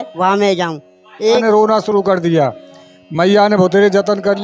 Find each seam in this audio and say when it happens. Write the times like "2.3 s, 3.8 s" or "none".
1.4 s